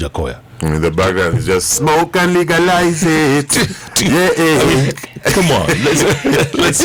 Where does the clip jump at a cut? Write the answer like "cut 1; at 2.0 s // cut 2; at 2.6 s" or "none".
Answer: none